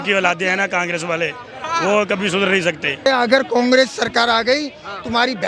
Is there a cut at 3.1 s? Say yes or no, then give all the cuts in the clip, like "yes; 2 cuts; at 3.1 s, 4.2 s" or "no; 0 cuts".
yes; 1 cut; at 3.1 s